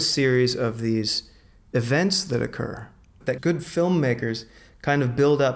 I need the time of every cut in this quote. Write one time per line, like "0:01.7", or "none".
0:03.3